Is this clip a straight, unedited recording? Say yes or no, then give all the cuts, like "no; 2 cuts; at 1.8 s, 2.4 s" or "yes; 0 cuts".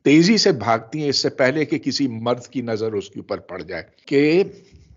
no; 1 cut; at 4.0 s